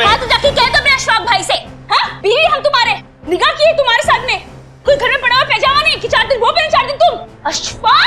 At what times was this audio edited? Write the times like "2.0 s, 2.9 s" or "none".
none

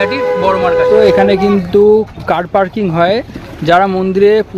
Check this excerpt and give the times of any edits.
1.1 s

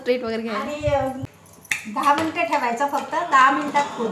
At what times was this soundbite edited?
none

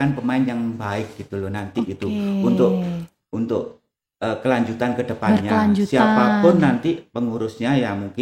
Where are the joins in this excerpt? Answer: none

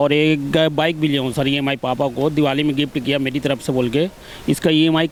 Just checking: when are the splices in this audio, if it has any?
none

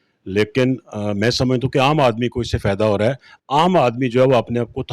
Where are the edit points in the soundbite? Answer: none

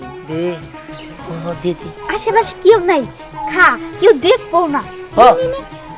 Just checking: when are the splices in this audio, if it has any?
1.2 s

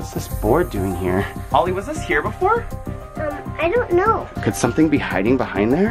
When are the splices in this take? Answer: 1.3 s, 4.3 s

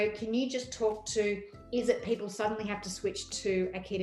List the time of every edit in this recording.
none

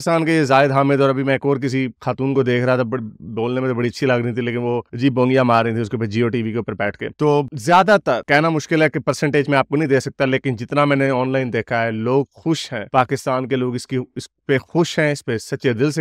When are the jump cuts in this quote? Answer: none

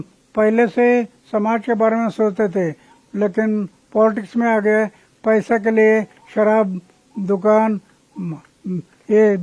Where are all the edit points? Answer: none

